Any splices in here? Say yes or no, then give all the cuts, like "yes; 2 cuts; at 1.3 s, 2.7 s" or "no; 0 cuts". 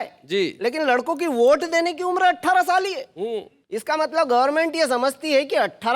no; 0 cuts